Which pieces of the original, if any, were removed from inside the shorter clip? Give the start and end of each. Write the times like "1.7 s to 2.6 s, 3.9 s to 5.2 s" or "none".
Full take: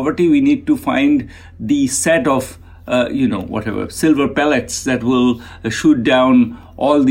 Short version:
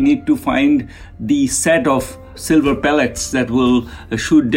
2.7 s to 3.9 s